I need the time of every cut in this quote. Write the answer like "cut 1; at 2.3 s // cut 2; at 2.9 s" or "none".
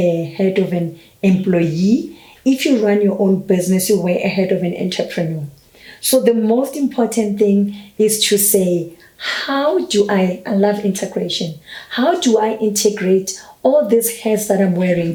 none